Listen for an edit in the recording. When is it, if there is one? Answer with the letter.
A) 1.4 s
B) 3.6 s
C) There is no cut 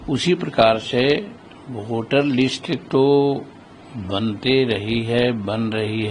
C